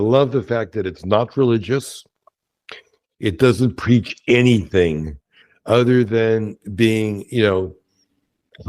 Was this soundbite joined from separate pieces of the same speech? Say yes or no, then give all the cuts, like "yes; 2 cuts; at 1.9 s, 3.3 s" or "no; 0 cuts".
no; 0 cuts